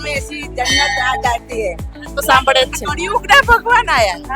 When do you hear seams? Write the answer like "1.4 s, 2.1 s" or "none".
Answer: 2.2 s